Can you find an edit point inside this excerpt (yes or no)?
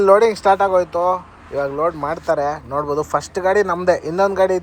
no